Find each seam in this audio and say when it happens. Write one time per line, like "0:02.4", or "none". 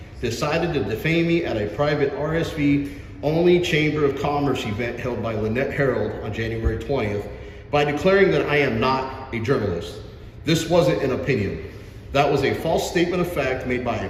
none